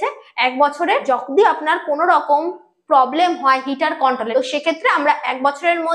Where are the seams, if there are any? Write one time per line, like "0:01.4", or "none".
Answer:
0:01.0
0:04.2